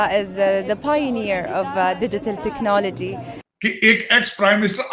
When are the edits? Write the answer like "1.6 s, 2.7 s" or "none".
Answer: 3.4 s